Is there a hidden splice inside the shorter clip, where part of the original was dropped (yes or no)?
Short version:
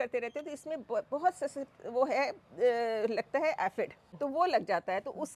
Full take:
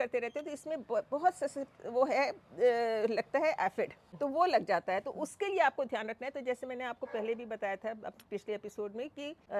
no